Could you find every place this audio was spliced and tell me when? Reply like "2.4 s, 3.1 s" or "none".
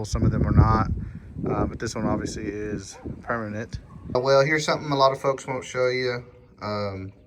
4.1 s